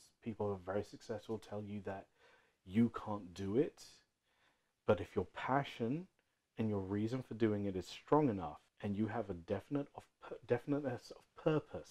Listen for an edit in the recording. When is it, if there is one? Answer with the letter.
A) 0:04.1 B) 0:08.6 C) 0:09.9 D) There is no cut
B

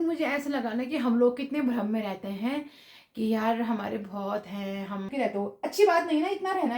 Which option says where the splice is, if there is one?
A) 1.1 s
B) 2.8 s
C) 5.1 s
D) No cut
C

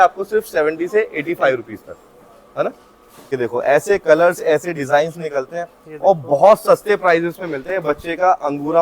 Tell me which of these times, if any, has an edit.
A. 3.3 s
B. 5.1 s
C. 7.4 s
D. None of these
A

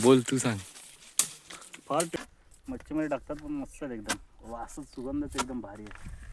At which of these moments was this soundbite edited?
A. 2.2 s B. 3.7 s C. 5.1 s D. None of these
A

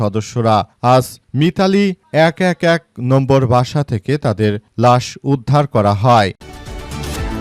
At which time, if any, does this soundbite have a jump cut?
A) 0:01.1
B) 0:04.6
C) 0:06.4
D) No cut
C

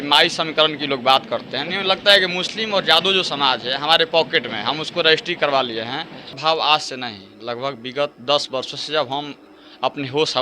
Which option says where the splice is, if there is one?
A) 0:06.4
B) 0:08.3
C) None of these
A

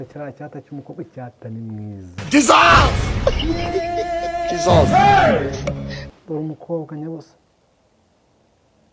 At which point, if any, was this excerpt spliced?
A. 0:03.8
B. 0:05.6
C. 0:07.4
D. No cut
D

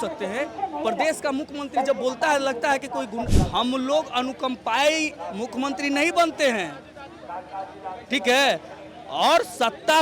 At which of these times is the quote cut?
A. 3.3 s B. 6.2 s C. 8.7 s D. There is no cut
A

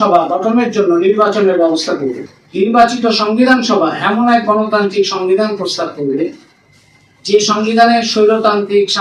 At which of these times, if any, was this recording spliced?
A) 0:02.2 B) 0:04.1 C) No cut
A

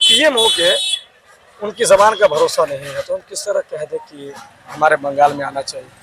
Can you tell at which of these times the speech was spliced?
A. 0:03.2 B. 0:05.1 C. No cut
C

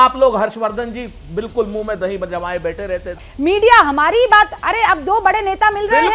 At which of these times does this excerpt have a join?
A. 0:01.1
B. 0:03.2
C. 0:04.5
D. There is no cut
B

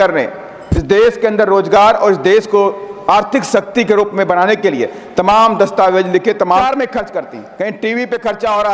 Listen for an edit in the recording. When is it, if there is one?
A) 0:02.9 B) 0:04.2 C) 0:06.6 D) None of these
C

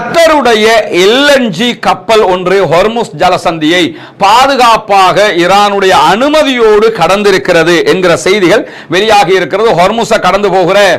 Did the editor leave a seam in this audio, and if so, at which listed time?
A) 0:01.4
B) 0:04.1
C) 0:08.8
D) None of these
D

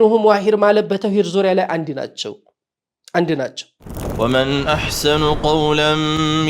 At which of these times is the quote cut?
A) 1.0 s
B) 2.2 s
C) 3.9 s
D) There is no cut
C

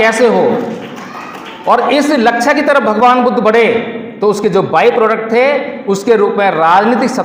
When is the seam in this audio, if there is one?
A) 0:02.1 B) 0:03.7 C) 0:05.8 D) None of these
D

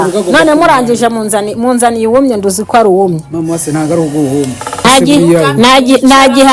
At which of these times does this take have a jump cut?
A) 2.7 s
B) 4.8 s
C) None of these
B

